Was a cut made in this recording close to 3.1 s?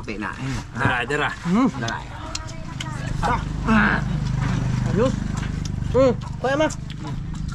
no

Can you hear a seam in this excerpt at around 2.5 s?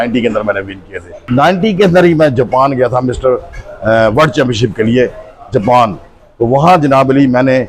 no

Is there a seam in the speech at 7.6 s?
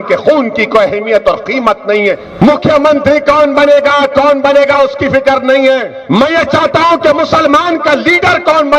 no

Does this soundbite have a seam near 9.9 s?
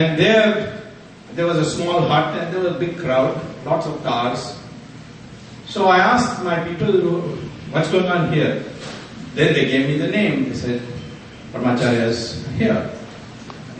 no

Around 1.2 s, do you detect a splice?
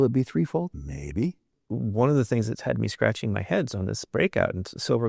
yes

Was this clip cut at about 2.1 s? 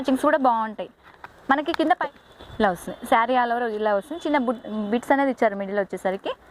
yes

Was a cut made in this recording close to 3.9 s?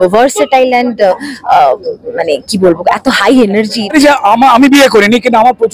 yes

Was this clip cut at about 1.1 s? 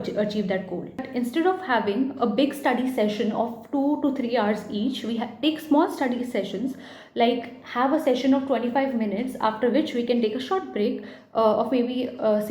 yes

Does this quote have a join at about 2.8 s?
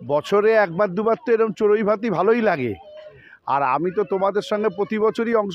no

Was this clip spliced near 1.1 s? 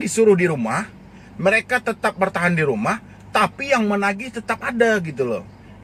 no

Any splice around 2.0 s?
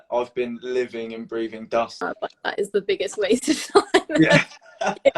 yes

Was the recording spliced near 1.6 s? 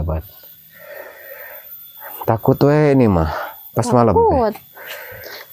no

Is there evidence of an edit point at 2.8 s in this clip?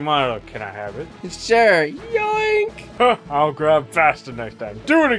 yes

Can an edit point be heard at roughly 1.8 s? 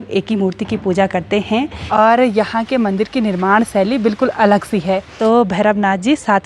yes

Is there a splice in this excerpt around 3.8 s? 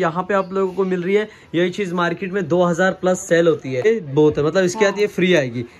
yes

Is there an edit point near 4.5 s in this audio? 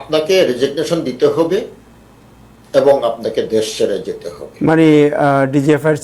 no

